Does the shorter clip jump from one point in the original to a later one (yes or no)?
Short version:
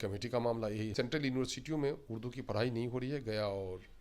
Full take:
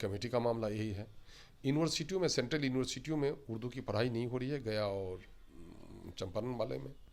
yes